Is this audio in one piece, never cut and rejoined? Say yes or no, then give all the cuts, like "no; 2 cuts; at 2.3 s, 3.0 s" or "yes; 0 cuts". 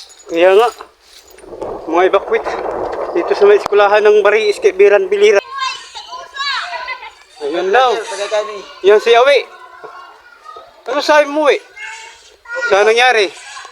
no; 1 cut; at 5.4 s